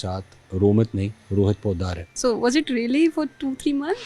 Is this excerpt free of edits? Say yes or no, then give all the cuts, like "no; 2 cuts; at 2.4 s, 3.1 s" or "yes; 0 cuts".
no; 1 cut; at 2.1 s